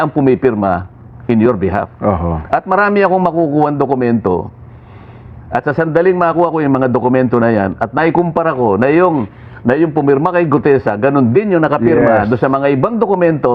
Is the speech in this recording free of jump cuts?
yes; 0 cuts

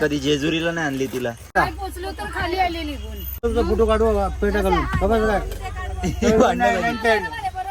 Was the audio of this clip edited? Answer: yes; 2 cuts; at 1.6 s, 3.4 s

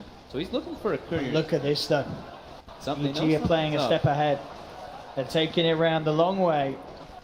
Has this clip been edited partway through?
no; 0 cuts

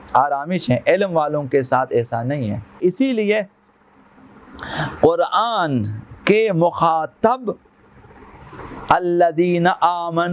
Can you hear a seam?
yes; 1 cut; at 2.8 s

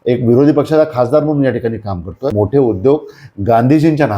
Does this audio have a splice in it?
yes; 1 cut; at 2.4 s

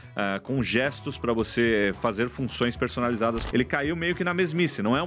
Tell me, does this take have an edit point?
yes; 1 cut; at 3.4 s

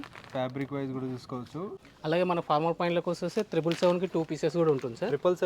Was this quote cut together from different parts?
yes; 1 cut; at 1.8 s

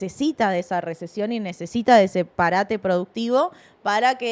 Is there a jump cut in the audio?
no; 0 cuts

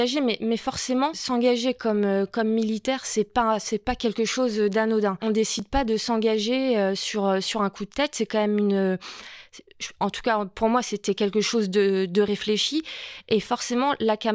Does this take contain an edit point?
yes; 2 cuts; at 1.2 s, 5.2 s

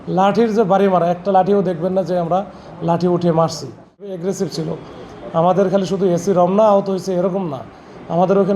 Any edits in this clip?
yes; 1 cut; at 4.1 s

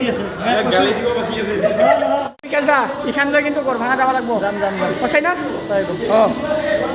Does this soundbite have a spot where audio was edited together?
yes; 1 cut; at 2.3 s

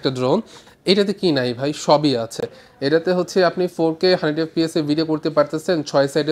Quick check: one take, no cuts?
yes; 0 cuts

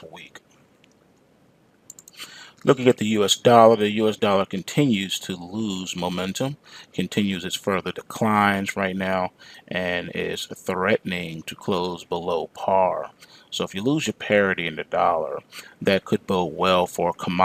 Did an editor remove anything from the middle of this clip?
no; 0 cuts

